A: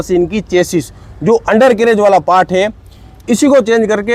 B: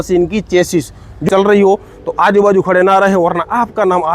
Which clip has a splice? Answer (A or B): B